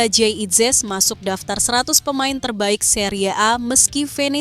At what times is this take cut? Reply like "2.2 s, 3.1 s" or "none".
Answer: none